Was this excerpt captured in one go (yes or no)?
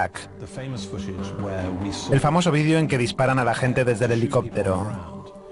yes